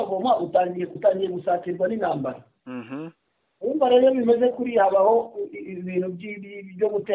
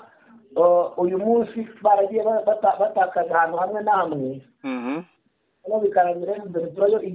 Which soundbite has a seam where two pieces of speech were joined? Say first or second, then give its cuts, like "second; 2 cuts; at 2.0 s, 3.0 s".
first; 1 cut; at 0.9 s